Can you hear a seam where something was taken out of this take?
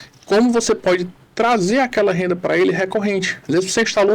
no; 0 cuts

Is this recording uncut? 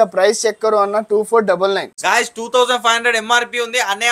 no; 1 cut; at 1.9 s

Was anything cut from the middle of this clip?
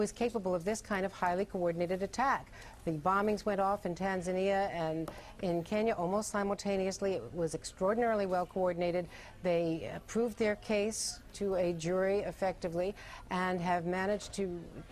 yes; 1 cut; at 4.2 s

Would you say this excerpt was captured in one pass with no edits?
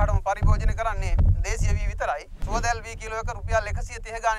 no; 1 cut; at 2.4 s

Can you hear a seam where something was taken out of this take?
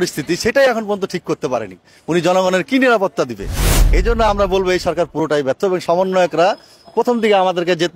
no; 0 cuts

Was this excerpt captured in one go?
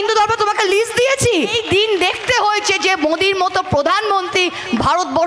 no; 1 cut; at 1.5 s

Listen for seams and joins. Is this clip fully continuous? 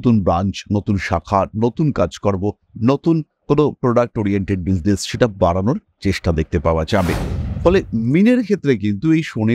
yes; 0 cuts

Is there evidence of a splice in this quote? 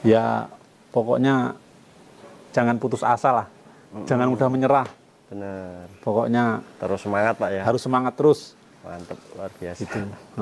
yes; 1 cut; at 2.5 s

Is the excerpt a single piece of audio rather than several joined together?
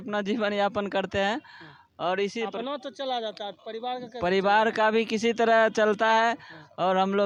yes; 0 cuts

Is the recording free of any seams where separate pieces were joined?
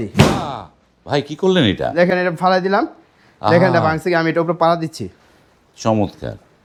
yes; 0 cuts

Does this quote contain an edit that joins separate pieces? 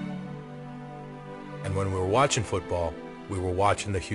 yes; 1 cut; at 1.0 s

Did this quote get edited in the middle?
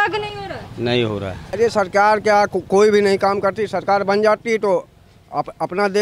yes; 1 cut; at 1.5 s

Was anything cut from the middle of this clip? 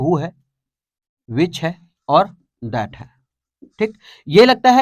no; 0 cuts

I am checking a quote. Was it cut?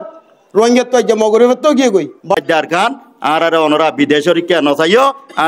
yes; 1 cut; at 2.4 s

